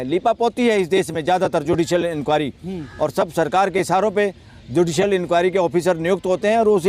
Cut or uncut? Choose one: uncut